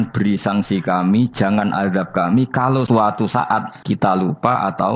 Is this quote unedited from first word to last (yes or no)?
no